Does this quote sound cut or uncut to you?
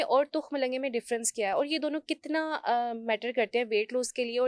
uncut